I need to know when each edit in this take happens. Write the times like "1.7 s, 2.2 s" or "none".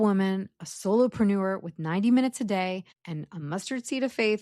3.0 s